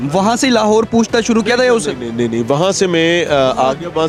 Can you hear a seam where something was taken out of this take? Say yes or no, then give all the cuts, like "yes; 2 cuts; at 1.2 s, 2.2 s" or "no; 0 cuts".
no; 0 cuts